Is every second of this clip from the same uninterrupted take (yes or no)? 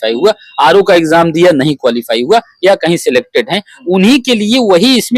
yes